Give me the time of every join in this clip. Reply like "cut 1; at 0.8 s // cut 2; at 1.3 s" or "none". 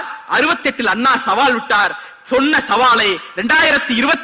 none